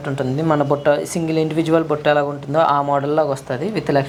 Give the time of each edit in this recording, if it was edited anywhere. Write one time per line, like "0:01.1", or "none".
none